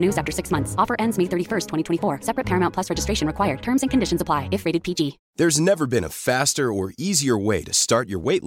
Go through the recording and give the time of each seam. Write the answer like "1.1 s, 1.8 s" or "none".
5.2 s